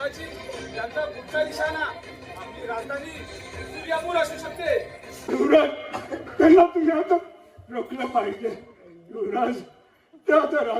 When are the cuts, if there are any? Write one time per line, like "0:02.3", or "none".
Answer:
0:05.3